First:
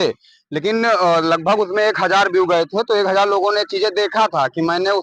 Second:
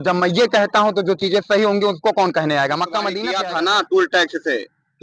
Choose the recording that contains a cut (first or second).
second